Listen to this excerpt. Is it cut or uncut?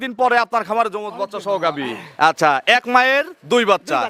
uncut